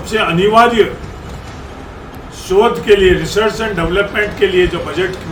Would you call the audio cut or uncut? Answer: uncut